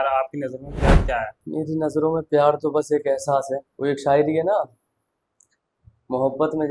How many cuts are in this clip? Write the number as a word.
zero